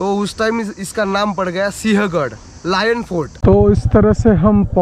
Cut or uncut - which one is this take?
cut